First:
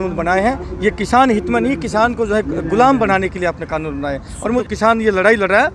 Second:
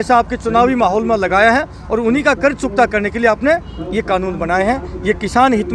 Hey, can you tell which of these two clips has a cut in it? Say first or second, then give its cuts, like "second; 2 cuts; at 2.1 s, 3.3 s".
first; 1 cut; at 4.6 s